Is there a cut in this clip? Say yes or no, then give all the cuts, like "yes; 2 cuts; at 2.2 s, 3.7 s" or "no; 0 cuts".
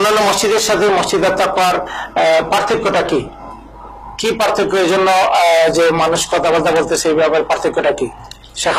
no; 0 cuts